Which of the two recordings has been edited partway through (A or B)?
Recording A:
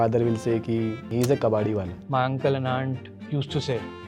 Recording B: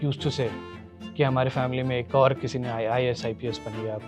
A